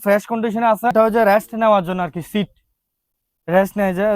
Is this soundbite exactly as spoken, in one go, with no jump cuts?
no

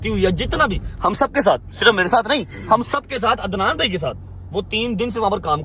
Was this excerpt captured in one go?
yes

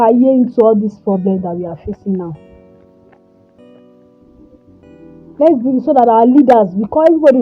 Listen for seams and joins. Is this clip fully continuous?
yes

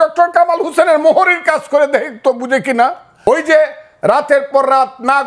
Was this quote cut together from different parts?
yes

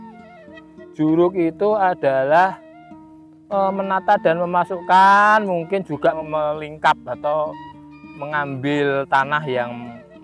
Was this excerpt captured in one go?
no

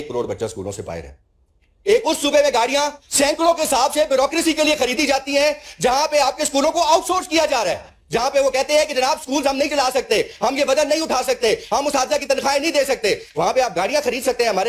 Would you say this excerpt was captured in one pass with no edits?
yes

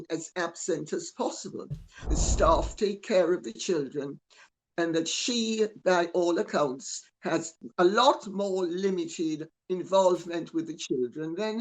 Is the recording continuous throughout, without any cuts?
no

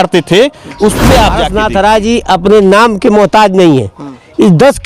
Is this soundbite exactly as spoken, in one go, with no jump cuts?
no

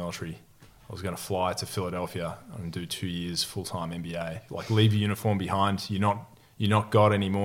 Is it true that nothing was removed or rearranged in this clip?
no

